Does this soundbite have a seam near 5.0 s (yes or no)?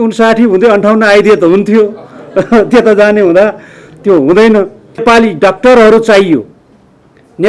yes